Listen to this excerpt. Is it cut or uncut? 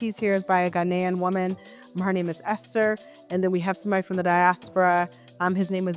uncut